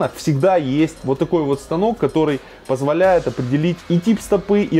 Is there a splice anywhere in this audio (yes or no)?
yes